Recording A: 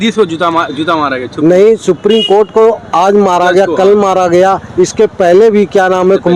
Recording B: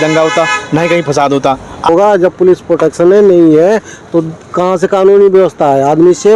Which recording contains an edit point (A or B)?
B